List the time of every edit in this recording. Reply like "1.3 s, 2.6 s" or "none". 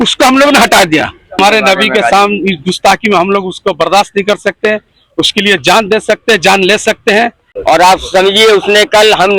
1.4 s, 7.3 s